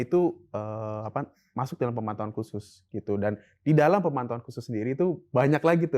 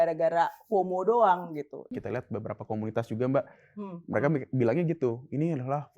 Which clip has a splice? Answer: second; 1 cut; at 1.9 s

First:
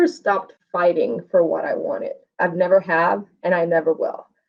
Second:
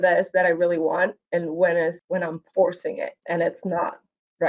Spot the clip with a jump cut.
second; 2 cuts; at 2.0 s, 3.2 s

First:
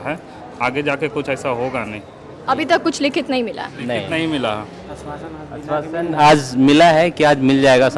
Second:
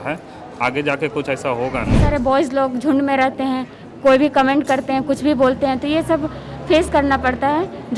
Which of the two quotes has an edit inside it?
second; 1 cut; at 2.0 s

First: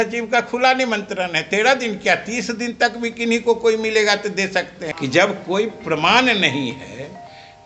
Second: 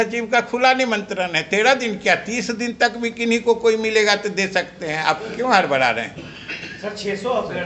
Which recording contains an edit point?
first; 1 cut; at 4.8 s

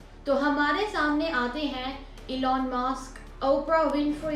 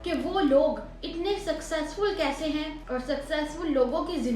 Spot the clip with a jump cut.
second; 1 cut; at 2.8 s

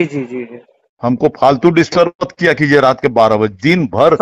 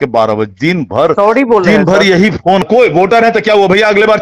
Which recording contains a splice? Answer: second; 1 cut; at 2.6 s

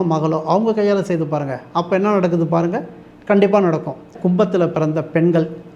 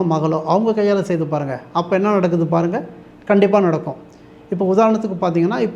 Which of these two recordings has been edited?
first; 1 cut; at 4.1 s

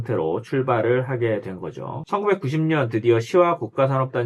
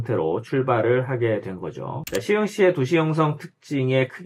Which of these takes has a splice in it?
first; 1 cut; at 2.0 s

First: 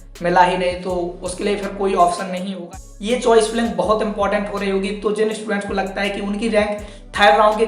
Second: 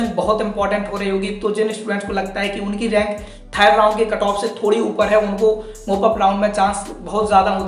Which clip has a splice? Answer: first; 1 cut; at 2.7 s

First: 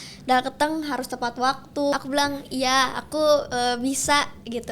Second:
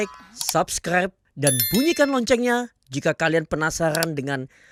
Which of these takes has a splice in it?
first; 1 cut; at 1.9 s

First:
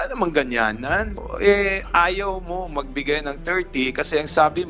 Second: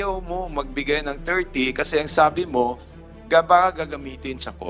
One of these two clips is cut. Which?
first; 1 cut; at 1.2 s

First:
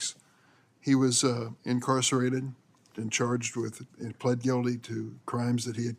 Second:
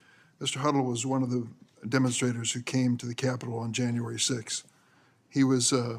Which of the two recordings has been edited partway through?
first; 1 cut; at 2.8 s

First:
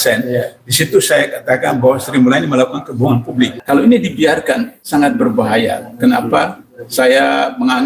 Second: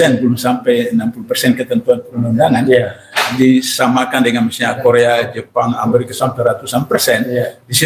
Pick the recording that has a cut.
first; 2 cuts; at 3.6 s, 4.7 s

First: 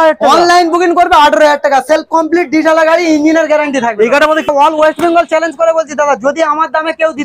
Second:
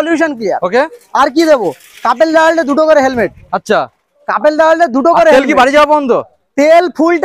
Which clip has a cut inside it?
first; 1 cut; at 4.5 s

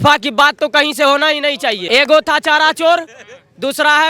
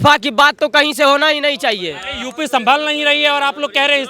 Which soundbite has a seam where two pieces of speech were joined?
first; 1 cut; at 1.8 s

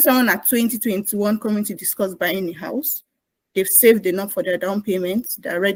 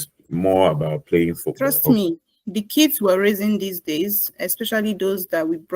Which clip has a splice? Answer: second; 1 cut; at 1.5 s

